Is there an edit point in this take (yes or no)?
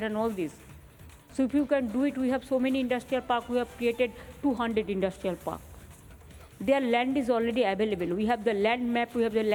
no